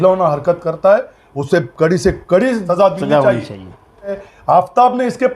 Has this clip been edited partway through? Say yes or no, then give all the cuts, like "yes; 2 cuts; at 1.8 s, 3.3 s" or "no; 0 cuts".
yes; 2 cuts; at 2.6 s, 4.2 s